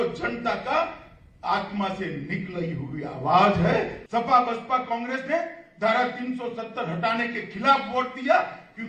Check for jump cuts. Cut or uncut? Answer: cut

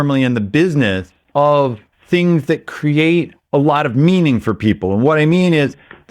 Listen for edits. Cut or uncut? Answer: cut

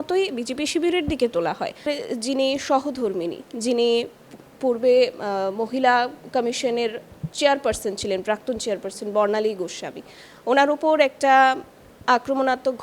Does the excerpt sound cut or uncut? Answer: cut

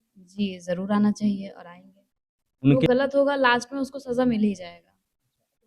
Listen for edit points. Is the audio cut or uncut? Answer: cut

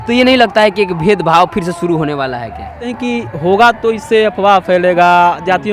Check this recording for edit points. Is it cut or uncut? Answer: cut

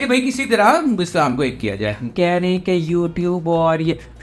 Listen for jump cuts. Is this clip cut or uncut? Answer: cut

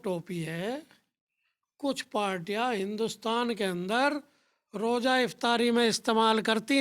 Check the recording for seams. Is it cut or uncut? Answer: uncut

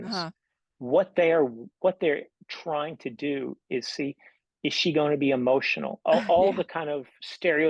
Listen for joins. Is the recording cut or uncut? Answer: uncut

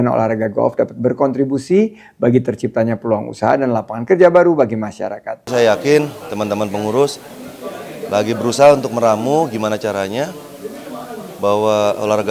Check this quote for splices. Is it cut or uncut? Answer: cut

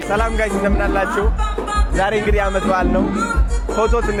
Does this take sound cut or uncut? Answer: uncut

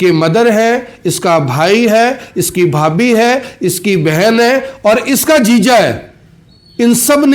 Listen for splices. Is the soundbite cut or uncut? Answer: uncut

